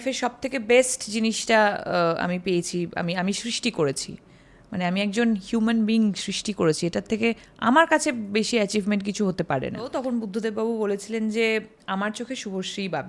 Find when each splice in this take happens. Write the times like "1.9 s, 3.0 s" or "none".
9.9 s